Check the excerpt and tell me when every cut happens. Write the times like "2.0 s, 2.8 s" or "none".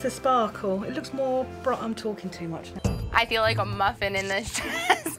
2.8 s

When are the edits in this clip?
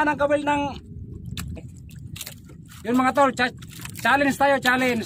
1.7 s

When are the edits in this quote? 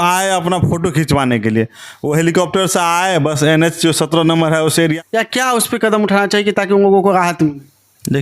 4.9 s

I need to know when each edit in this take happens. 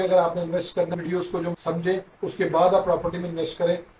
1.3 s

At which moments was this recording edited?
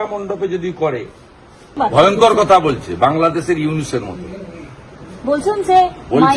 1.7 s

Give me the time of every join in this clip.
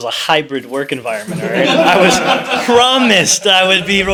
none

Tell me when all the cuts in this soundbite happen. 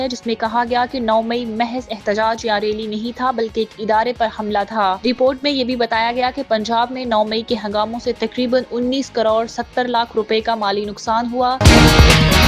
11.6 s

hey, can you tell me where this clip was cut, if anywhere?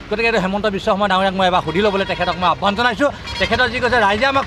3.2 s

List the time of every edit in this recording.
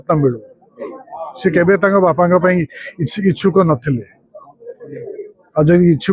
none

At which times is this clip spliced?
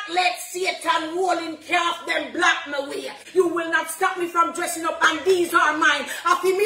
3.2 s

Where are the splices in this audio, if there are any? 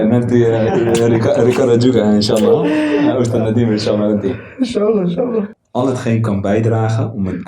5.6 s

